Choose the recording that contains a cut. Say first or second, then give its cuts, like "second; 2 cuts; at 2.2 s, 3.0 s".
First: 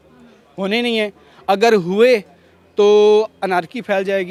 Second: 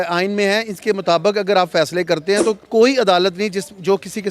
second; 1 cut; at 2.6 s